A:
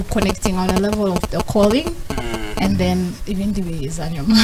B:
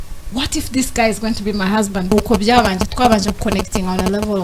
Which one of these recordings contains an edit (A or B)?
B